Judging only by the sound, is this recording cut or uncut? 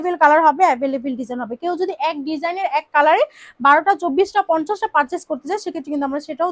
uncut